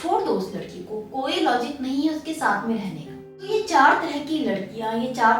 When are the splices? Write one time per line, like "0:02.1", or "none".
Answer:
0:03.5